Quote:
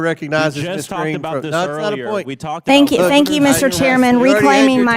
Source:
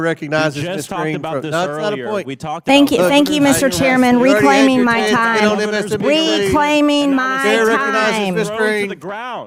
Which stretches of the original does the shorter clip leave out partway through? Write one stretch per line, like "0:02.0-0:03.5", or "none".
none

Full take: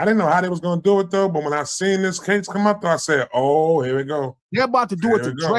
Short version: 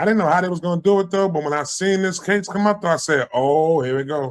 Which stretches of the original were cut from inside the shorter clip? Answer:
none

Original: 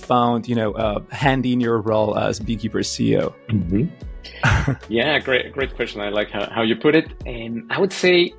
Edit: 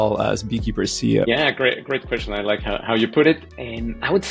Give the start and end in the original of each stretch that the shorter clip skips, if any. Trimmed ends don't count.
0:03.2-0:04.9

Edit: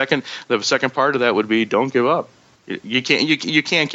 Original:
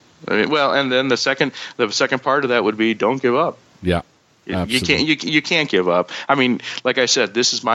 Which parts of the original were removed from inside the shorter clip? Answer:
0:03.7-0:04.2

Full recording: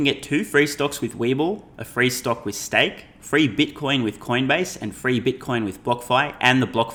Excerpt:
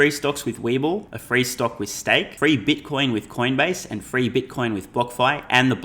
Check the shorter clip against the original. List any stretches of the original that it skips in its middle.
0:01.7-0:01.8
0:03.0-0:03.2

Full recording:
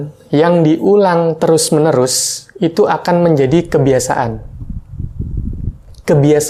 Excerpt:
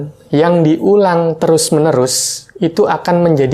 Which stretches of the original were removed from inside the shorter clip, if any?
none

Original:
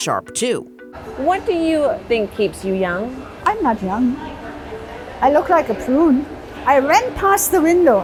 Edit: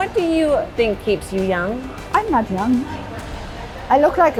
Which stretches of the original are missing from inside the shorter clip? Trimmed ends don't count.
none

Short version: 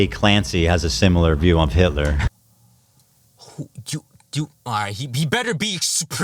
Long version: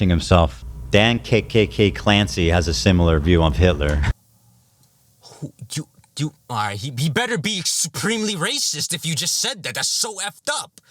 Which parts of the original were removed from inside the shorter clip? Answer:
none

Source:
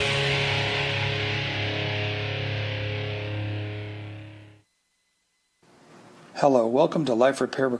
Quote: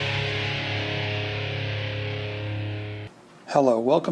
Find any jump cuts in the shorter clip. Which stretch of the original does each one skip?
0:04.0-0:06.0

